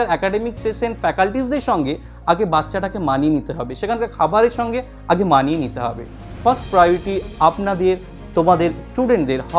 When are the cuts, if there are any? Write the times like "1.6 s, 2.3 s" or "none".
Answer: none